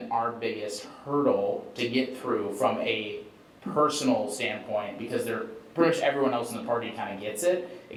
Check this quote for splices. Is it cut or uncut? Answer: uncut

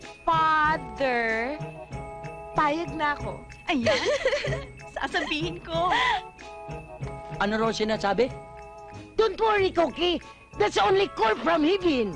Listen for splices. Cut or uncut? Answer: uncut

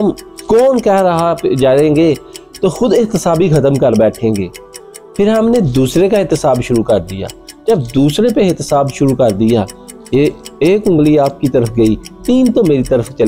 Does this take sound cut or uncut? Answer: uncut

